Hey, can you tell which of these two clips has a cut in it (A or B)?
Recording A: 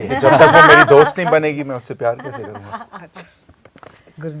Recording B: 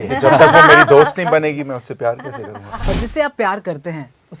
B